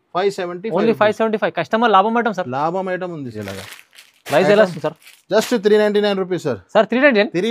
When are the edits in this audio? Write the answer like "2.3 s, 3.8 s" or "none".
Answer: 3.4 s